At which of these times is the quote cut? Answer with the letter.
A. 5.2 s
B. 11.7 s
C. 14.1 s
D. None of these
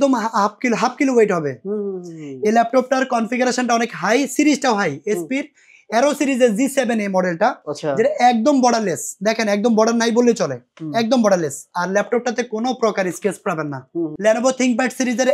C